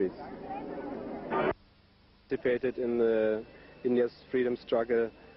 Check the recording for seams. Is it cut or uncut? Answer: cut